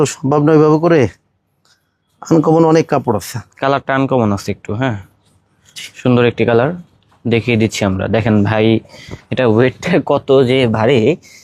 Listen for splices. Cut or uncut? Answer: uncut